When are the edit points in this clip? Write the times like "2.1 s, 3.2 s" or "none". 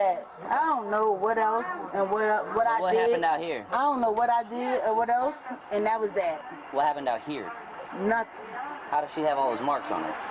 none